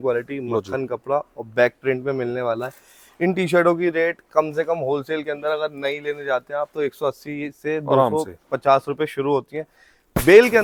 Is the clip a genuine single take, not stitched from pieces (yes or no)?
yes